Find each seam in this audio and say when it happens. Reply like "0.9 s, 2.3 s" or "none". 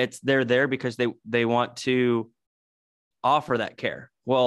none